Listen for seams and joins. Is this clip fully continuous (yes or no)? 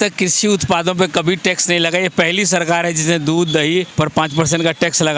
no